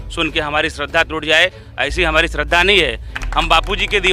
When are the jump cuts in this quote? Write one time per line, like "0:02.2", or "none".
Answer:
0:03.1